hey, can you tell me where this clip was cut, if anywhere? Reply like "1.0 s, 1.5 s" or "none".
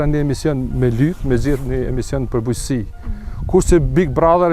none